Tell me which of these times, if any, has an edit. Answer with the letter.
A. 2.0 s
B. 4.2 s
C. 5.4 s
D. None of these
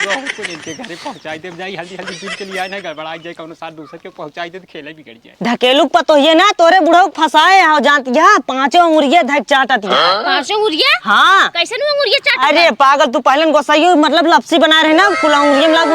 C